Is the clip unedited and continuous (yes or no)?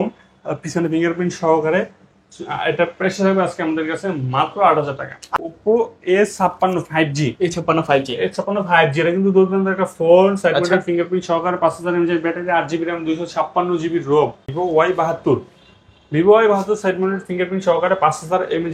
no